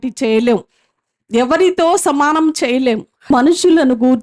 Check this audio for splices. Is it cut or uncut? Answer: cut